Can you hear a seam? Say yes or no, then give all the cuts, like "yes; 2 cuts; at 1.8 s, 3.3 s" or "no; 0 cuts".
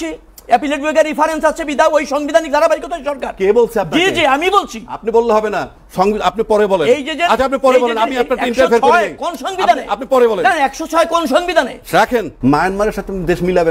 yes; 1 cut; at 12.3 s